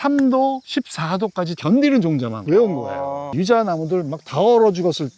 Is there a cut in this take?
yes; 2 cuts; at 1.6 s, 3.2 s

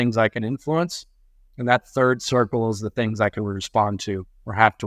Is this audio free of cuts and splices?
yes; 0 cuts

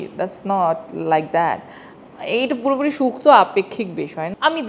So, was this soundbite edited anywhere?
no; 0 cuts

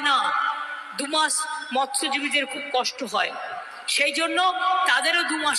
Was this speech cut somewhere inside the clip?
no; 0 cuts

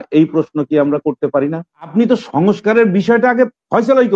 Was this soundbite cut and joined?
yes; 1 cut; at 1.9 s

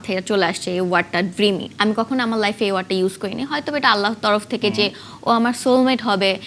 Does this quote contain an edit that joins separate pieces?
no; 0 cuts

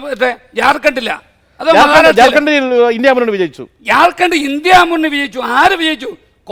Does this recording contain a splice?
no; 0 cuts

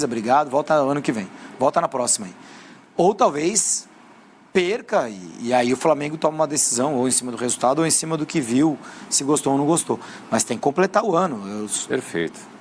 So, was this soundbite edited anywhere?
no; 0 cuts

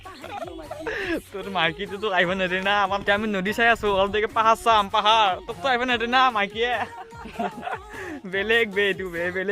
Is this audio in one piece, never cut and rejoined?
no; 1 cut; at 3.0 s

